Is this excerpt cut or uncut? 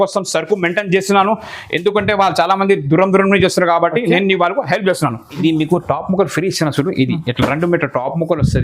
cut